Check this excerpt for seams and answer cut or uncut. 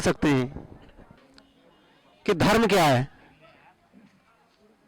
cut